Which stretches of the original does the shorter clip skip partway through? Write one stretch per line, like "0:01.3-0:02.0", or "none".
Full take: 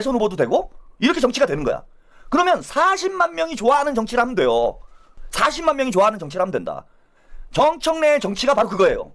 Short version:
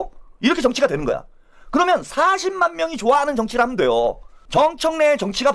0:04.9-0:07.3